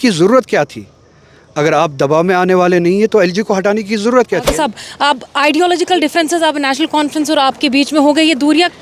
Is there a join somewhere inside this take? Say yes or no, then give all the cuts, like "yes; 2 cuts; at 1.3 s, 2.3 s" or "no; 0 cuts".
yes; 1 cut; at 4.5 s